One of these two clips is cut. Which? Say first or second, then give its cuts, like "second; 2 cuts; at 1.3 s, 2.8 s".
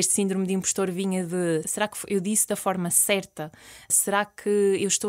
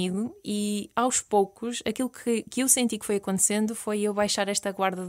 first; 2 cuts; at 1.7 s, 3.9 s